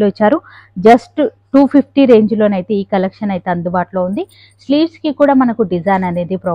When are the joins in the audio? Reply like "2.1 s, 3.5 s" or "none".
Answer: none